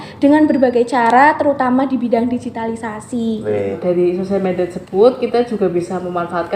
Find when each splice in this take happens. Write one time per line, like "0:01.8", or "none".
0:03.8